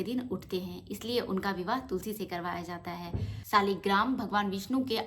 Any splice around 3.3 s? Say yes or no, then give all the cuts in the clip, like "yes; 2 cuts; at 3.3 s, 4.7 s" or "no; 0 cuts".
yes; 1 cut; at 3.3 s